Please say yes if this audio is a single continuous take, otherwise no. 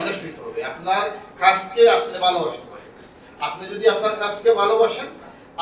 yes